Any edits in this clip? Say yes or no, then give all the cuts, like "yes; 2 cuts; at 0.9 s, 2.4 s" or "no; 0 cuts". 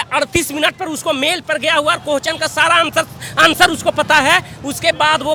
no; 0 cuts